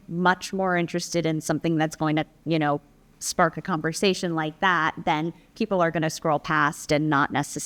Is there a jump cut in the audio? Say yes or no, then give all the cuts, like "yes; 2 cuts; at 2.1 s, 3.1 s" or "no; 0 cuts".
no; 0 cuts